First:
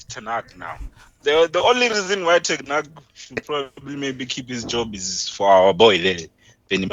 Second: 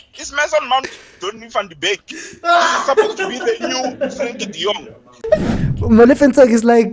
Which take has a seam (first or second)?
second